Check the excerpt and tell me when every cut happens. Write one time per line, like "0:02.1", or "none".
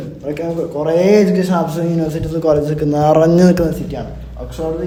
none